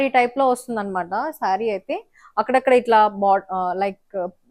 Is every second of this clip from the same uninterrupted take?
yes; 0 cuts

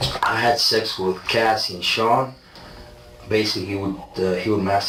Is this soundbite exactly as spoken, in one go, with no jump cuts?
yes; 0 cuts

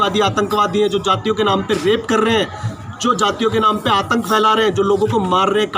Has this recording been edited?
no; 0 cuts

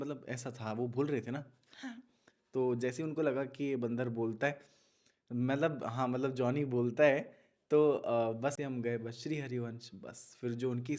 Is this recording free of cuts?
no; 1 cut; at 8.6 s

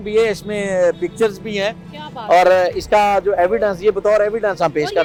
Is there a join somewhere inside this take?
no; 0 cuts

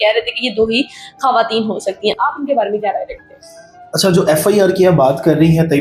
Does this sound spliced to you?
no; 0 cuts

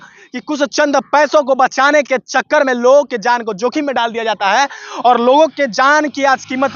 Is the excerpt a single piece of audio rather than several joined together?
yes; 0 cuts

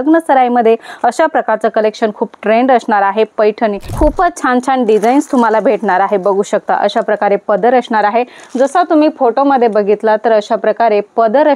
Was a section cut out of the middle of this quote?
yes; 1 cut; at 3.9 s

